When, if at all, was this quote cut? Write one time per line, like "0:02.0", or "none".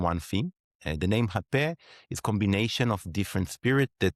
none